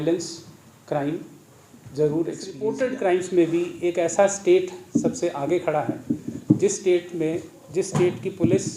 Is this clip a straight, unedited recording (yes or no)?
no